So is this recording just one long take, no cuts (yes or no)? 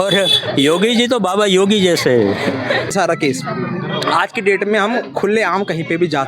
no